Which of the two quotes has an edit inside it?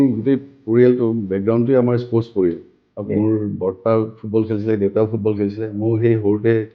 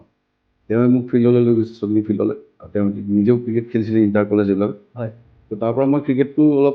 second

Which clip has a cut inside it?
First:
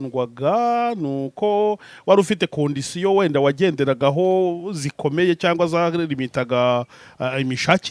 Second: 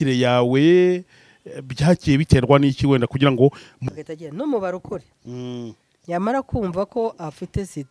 second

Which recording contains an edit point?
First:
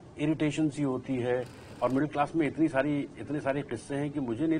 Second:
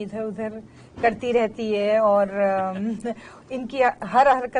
first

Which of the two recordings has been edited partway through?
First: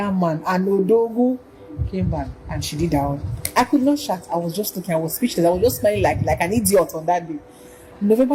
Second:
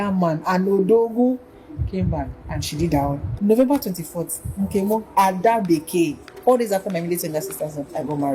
second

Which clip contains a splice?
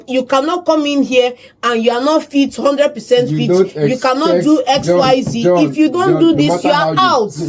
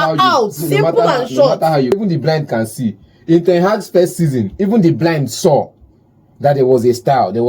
second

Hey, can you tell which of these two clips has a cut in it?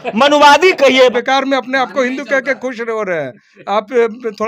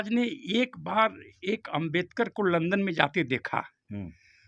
first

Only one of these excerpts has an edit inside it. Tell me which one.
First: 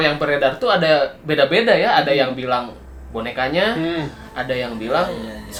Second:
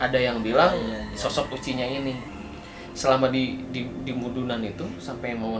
second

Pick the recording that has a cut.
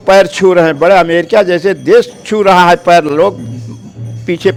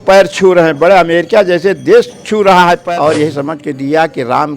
second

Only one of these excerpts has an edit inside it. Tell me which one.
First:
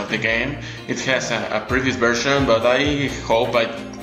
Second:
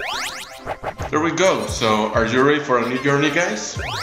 first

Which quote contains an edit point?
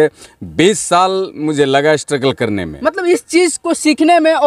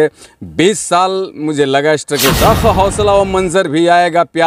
second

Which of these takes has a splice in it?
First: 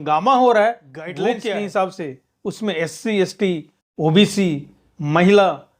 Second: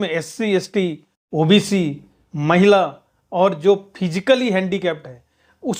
first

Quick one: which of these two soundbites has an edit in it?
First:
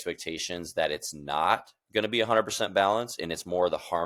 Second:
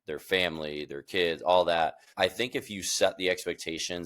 second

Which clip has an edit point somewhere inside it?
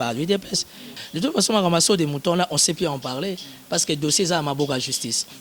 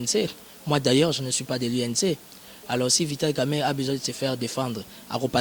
first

